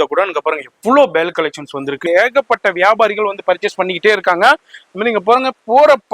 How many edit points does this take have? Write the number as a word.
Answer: one